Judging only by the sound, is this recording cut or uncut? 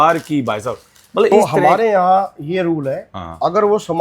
cut